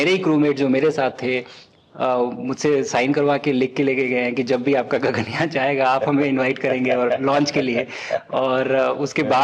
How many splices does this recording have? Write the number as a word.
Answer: zero